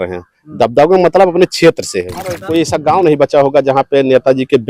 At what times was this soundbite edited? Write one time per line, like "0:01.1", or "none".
0:02.4